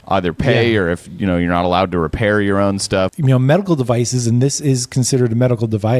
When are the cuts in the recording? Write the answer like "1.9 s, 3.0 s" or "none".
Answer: 3.1 s